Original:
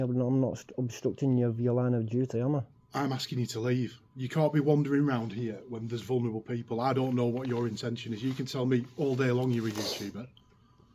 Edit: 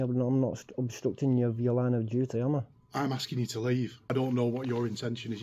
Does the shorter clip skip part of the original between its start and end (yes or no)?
yes